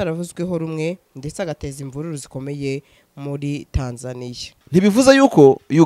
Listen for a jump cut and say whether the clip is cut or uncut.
cut